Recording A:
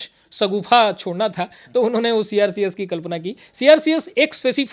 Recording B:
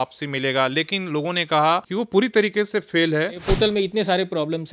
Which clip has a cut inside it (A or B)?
B